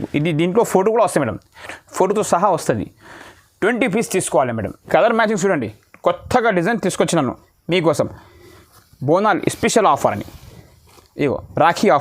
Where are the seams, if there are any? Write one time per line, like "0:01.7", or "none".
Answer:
0:04.7